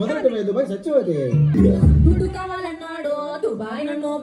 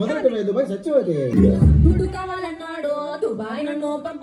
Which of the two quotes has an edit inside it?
second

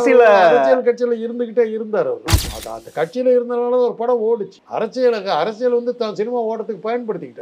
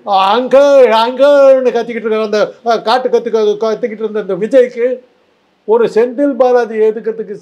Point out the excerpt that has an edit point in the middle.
first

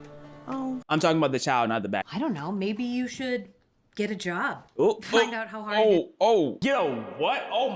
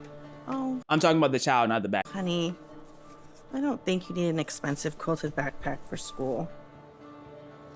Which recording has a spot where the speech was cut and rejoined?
first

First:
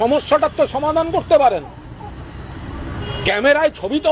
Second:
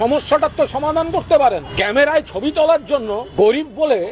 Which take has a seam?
second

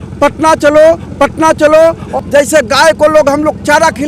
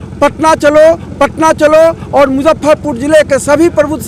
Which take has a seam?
first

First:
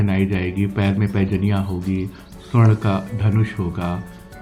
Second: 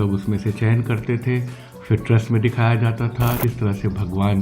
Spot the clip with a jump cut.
second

